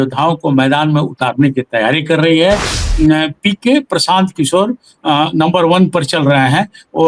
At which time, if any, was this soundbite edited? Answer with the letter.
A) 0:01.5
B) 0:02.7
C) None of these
B